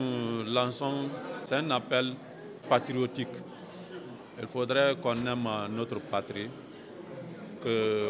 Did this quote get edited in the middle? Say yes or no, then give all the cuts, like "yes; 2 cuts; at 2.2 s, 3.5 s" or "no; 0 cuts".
yes; 2 cuts; at 1.4 s, 2.6 s